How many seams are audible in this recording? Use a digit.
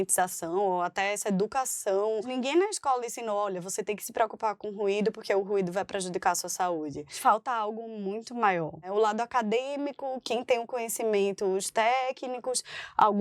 3